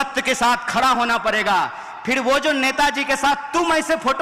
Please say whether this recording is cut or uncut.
uncut